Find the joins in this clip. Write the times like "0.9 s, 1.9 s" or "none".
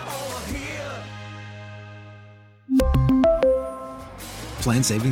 none